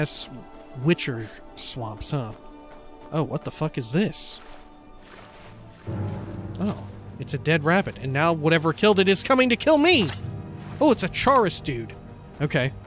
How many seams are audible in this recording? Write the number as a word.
zero